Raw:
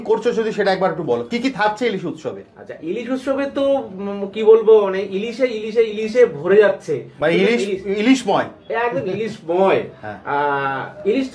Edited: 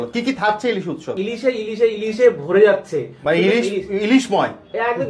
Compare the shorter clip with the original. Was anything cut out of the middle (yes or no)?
yes